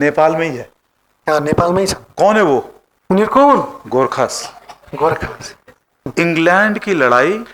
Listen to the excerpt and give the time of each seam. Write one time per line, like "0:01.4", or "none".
0:06.1